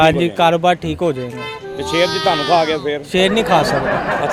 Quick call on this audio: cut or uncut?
uncut